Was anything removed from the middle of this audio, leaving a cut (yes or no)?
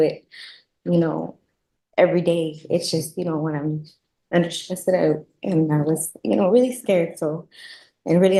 no